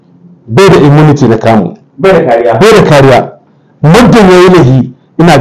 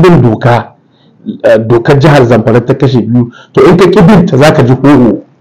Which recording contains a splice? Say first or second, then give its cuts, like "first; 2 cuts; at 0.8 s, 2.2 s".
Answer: second; 1 cut; at 1.1 s